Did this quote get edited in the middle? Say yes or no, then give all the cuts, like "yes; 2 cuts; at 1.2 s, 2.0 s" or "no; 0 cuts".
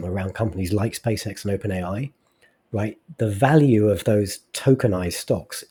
no; 0 cuts